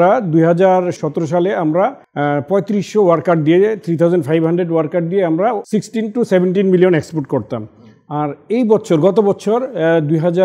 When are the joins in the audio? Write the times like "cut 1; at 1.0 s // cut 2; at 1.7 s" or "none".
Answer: cut 1; at 2.0 s // cut 2; at 5.6 s